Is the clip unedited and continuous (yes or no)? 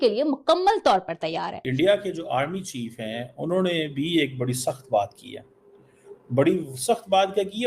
no